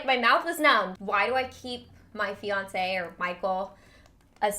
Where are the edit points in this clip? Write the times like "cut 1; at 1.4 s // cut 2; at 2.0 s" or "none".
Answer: cut 1; at 0.9 s